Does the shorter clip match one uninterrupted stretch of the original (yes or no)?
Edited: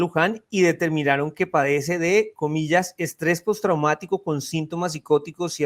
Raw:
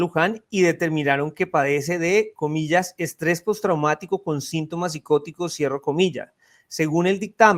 yes